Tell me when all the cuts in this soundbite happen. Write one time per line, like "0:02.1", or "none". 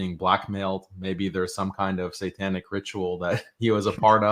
none